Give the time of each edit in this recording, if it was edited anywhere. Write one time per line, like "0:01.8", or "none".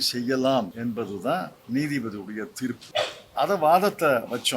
0:01.1
0:02.8